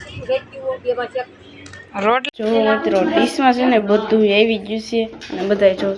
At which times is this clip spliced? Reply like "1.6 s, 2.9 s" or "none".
2.2 s